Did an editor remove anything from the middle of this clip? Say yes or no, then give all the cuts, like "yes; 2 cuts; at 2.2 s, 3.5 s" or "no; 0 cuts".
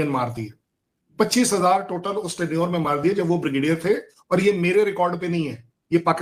no; 0 cuts